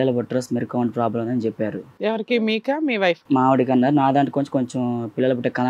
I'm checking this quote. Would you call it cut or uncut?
uncut